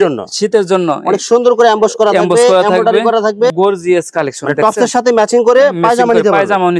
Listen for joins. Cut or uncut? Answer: cut